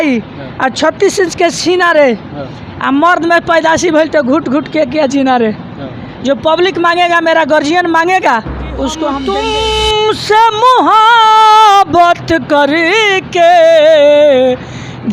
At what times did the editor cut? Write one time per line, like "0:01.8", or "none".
0:09.1